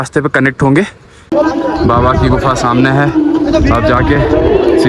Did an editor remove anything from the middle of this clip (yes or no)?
yes